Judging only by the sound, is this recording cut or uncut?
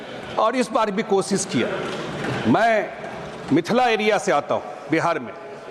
uncut